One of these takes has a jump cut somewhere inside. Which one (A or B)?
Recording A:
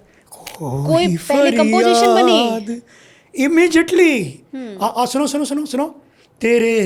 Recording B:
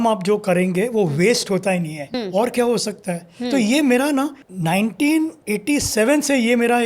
B